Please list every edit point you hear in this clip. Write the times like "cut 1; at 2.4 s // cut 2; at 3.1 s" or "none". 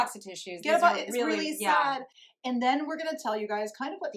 cut 1; at 2.1 s

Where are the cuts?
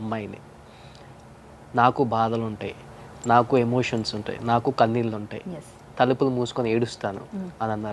none

